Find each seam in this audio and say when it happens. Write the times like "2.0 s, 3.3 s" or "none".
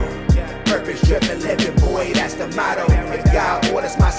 none